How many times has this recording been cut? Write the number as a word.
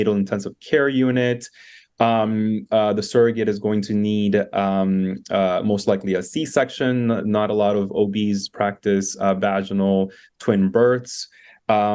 zero